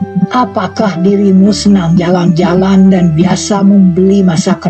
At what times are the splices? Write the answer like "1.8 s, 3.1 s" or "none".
none